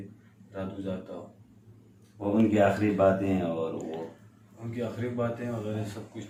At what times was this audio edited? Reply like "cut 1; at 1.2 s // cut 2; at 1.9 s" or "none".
none